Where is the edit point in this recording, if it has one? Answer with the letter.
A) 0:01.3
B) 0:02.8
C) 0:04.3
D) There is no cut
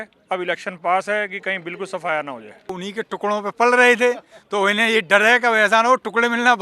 B